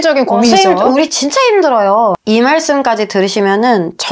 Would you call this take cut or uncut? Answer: cut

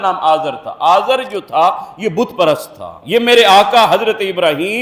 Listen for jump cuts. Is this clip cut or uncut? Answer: uncut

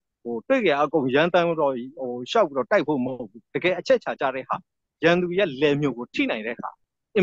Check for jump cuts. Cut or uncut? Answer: uncut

